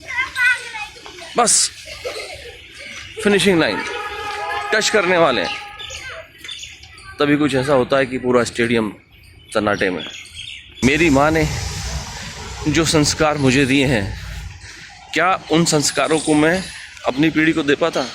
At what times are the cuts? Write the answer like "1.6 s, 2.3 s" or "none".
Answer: 10.8 s